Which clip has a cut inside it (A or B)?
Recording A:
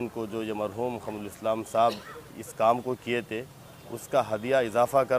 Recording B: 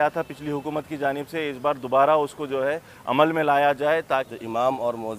B